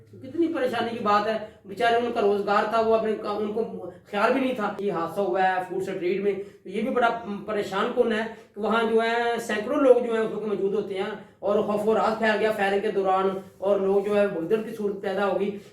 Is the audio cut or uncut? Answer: cut